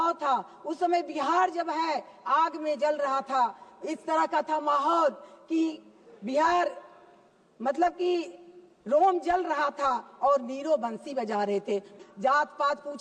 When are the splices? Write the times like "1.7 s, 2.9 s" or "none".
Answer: 12.0 s